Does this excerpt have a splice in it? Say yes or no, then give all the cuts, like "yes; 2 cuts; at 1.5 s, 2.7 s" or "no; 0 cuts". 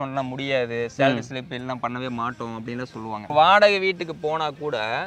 yes; 1 cut; at 3.3 s